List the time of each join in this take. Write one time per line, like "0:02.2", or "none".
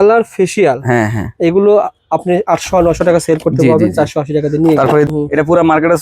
0:05.1